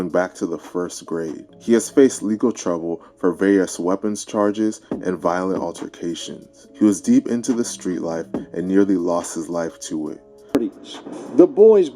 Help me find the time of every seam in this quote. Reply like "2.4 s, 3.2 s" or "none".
10.6 s